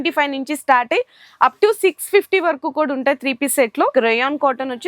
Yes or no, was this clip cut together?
yes